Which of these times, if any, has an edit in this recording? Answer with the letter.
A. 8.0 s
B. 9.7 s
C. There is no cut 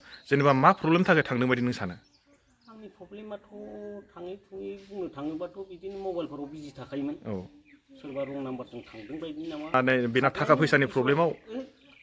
B